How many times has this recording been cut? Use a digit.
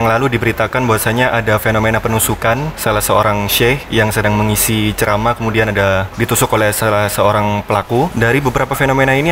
4